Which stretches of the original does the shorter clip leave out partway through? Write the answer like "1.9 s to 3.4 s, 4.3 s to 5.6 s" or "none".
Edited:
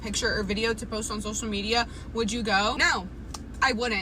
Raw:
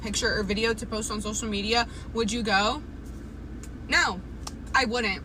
2.8 s to 3.9 s